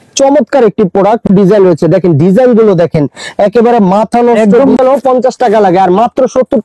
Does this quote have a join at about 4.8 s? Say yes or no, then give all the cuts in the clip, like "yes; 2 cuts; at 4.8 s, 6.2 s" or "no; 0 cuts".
yes; 2 cuts; at 1.3 s, 4.8 s